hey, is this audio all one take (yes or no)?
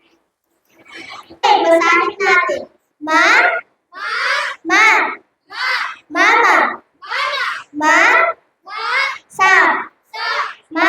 no